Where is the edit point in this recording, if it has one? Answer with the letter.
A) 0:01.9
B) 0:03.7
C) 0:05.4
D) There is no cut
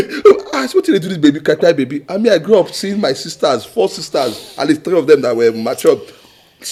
D